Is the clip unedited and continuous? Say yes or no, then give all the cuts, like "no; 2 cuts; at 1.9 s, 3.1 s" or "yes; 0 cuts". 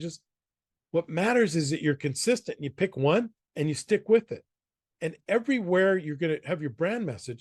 yes; 0 cuts